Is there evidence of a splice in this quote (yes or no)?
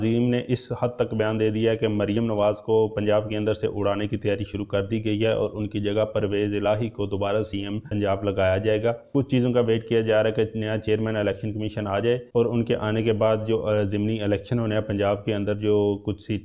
no